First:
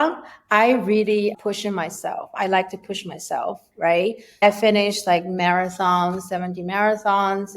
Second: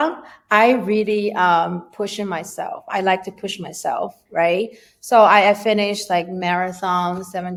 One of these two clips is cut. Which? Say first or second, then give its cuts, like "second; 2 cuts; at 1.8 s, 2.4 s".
first; 2 cuts; at 1.3 s, 4.4 s